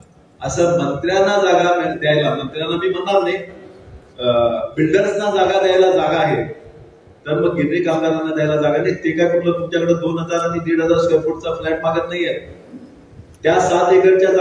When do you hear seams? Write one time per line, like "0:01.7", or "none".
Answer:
none